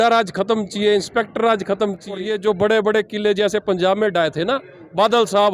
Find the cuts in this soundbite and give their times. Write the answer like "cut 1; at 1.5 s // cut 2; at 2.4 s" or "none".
cut 1; at 2.2 s